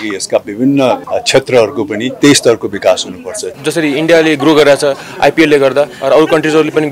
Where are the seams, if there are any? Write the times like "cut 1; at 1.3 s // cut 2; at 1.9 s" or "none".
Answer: cut 1; at 1.0 s // cut 2; at 2.1 s // cut 3; at 3.5 s